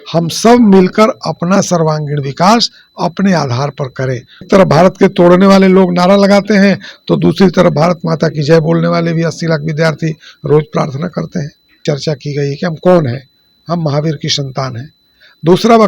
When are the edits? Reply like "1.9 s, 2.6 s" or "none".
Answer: 4.5 s, 11.8 s